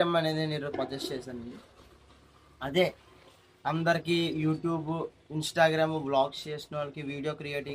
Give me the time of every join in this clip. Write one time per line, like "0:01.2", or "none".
none